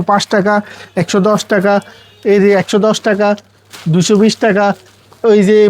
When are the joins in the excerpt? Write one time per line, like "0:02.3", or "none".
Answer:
none